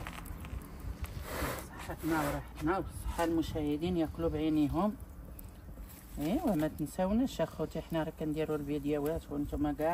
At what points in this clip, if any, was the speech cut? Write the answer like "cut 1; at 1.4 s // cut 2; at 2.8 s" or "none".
none